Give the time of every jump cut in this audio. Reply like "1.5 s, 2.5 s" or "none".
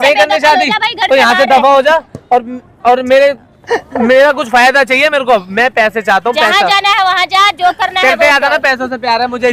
none